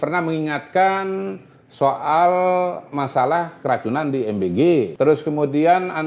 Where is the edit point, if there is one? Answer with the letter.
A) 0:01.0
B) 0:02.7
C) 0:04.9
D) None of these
C